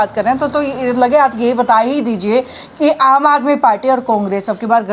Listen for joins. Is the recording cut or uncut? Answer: uncut